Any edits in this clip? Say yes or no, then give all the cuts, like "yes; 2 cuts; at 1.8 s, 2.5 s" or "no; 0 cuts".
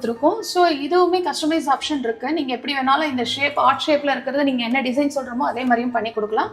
no; 0 cuts